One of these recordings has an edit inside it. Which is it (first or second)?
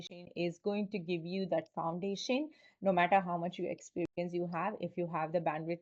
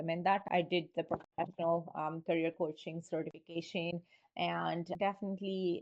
second